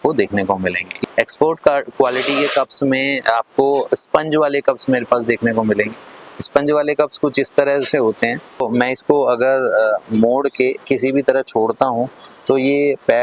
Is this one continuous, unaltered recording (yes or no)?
no